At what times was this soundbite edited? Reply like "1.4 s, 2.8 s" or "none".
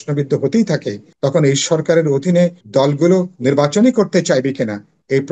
1.0 s, 2.6 s